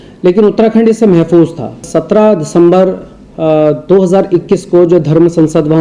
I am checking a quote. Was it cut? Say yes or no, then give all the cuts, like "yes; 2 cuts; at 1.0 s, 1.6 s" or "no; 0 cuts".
yes; 1 cut; at 1.9 s